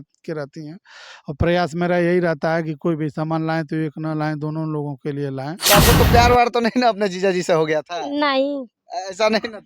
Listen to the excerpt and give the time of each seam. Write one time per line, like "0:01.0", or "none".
0:05.6

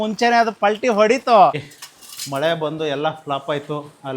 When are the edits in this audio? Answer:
0:01.7

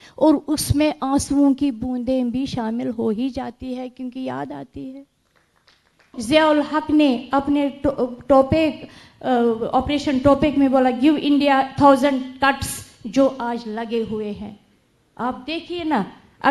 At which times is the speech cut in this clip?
0:06.2

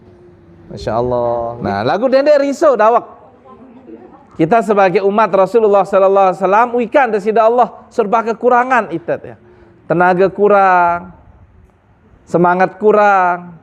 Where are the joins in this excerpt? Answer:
0:01.6

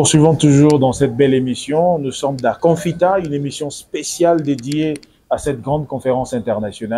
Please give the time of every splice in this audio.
0:02.6

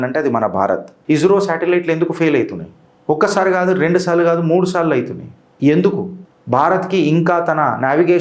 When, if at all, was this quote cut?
0:00.9

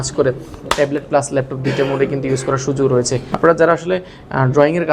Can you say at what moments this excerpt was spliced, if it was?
0:03.3

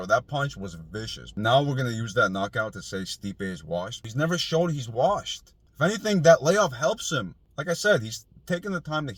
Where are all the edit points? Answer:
none

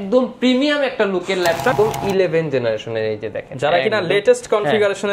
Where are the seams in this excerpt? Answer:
0:01.7

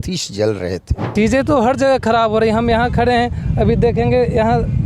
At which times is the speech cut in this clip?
0:01.0

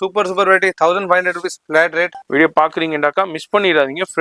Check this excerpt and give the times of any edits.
0:02.2

